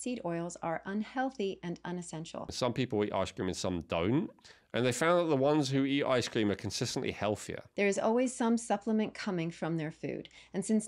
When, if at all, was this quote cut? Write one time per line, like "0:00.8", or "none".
0:02.5
0:07.6